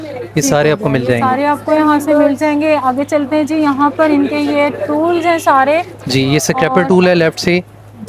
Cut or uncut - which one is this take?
uncut